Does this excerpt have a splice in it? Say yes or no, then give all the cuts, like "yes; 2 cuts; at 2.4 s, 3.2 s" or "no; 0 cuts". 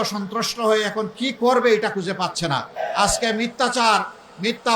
yes; 1 cut; at 2.7 s